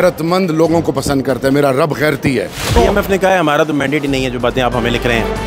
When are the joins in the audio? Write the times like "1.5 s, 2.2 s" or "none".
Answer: 2.7 s

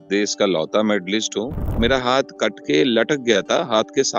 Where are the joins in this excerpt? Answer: 1.7 s

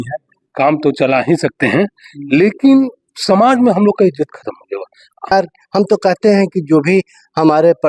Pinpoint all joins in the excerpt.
5.3 s

